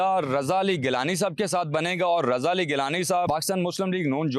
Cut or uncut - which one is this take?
cut